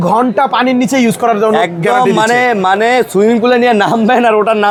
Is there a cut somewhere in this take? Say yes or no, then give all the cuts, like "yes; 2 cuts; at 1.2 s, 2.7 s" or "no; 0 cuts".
no; 0 cuts